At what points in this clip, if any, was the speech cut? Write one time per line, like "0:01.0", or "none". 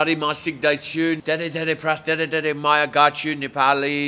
0:01.2

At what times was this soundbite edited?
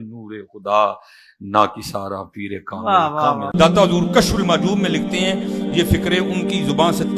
0:03.5

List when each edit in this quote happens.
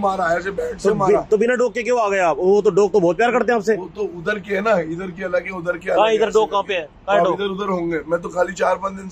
none

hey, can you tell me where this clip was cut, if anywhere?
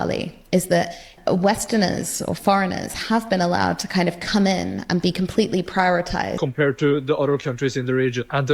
0:01.1
0:06.3

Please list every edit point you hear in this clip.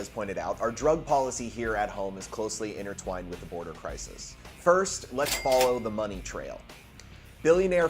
0:01.6

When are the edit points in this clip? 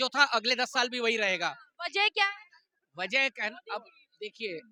none

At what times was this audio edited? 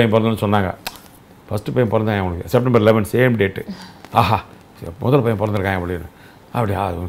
none

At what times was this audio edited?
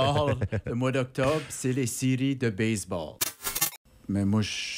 0:03.5

